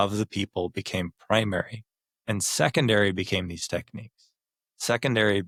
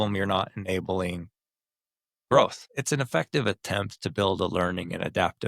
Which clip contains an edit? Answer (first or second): second